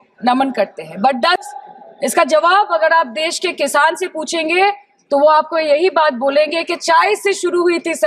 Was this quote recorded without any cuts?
no; 1 cut; at 1.4 s

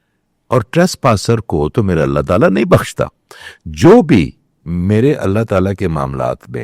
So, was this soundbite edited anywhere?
no; 0 cuts

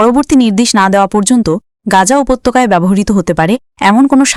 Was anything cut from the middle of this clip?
no; 0 cuts

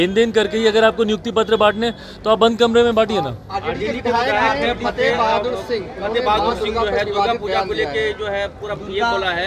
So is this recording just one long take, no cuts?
yes; 0 cuts

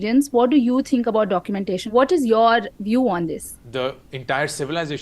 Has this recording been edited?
yes; 2 cuts; at 1.8 s, 3.5 s

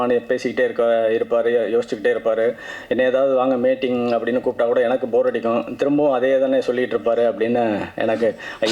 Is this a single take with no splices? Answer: yes; 0 cuts

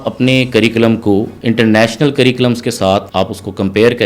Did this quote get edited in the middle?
yes; 2 cuts; at 1.3 s, 3.1 s

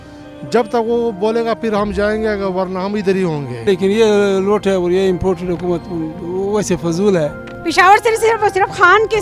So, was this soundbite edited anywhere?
yes; 2 cuts; at 3.7 s, 7.5 s

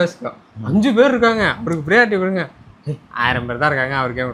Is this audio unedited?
yes; 0 cuts

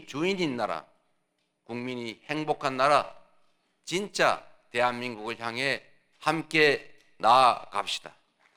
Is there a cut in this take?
no; 0 cuts

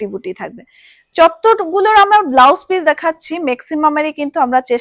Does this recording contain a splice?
no; 0 cuts

